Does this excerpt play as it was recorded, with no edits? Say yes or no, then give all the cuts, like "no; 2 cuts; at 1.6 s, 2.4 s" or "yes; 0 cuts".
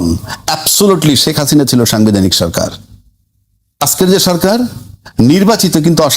no; 1 cut; at 3.8 s